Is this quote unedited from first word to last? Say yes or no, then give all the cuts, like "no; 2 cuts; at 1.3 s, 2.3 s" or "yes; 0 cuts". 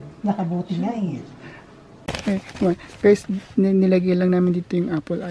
no; 1 cut; at 2.0 s